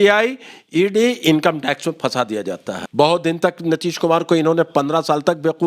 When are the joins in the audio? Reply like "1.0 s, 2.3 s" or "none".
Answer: 2.8 s